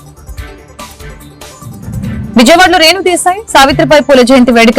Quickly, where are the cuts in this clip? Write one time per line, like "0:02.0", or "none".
0:01.5